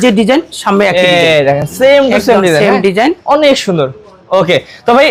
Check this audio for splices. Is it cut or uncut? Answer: uncut